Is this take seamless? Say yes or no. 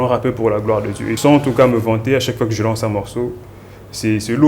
no